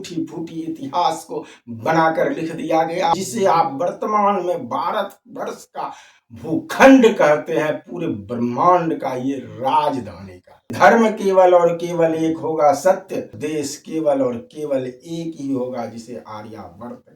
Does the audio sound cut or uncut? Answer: cut